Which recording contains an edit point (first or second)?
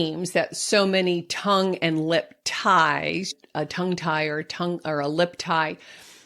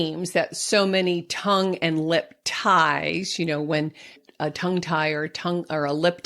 first